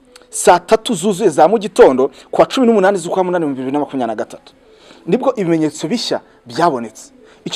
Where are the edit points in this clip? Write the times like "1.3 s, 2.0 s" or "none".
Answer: none